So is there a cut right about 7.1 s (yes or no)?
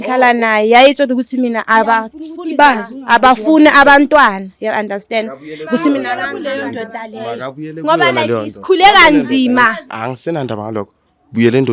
no